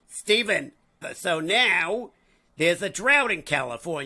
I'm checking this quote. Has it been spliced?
yes; 1 cut; at 1.1 s

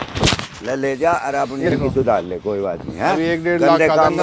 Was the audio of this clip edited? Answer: yes; 1 cut; at 1.7 s

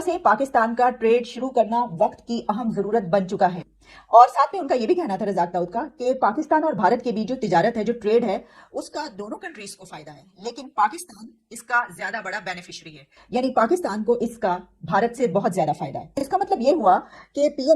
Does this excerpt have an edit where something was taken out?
no; 0 cuts

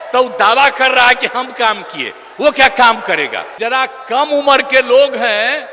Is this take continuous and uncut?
no; 1 cut; at 3.4 s

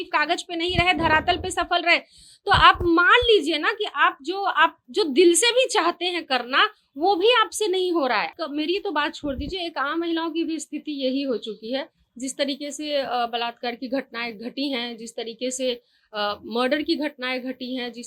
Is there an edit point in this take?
yes; 1 cut; at 8.3 s

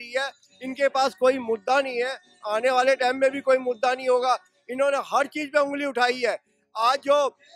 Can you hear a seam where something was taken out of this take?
no; 0 cuts

